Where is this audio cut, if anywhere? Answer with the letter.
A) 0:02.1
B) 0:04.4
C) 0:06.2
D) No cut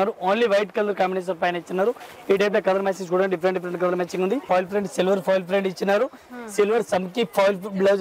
B